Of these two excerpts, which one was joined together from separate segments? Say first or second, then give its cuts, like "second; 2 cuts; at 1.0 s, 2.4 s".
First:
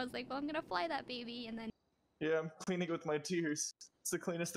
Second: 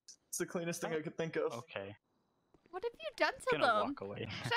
first; 1 cut; at 1.7 s